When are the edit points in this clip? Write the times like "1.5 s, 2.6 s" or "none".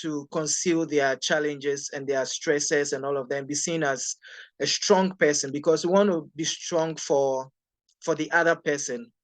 none